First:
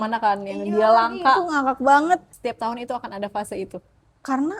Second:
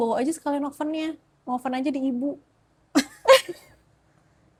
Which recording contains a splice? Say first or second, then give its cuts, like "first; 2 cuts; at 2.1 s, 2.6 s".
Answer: first; 1 cut; at 2.3 s